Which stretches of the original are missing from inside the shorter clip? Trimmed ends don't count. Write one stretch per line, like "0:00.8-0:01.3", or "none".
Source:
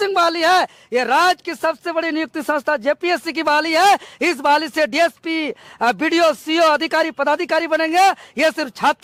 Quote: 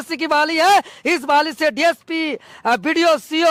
none